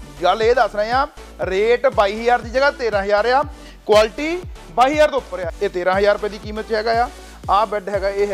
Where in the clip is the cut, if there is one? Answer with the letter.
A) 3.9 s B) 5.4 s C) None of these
B